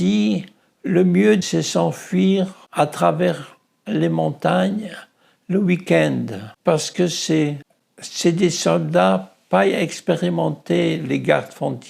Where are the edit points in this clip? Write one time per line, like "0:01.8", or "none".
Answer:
0:01.4